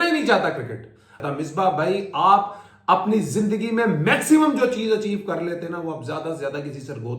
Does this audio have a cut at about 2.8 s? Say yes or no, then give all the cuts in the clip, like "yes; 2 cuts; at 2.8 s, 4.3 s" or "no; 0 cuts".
no; 1 cut; at 1.2 s